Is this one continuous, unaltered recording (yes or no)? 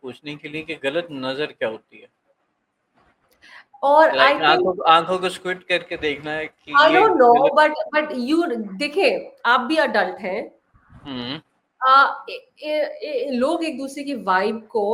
yes